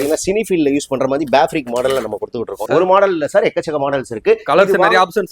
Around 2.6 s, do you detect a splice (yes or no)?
yes